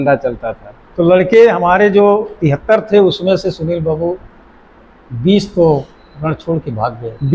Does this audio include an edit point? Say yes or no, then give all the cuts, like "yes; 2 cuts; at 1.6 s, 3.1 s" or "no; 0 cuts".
no; 0 cuts